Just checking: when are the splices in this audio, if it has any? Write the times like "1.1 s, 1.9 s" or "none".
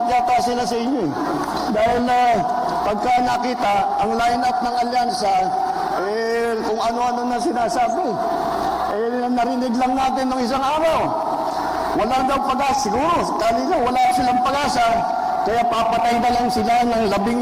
none